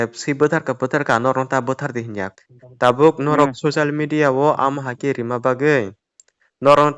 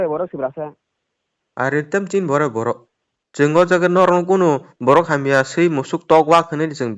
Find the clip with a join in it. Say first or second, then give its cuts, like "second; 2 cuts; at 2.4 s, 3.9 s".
first; 1 cut; at 2.3 s